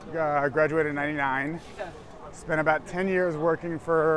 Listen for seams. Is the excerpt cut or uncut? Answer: uncut